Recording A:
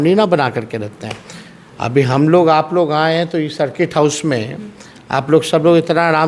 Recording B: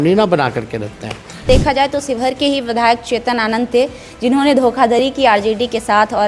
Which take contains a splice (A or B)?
B